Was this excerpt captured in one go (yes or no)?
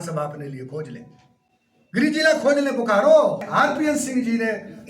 no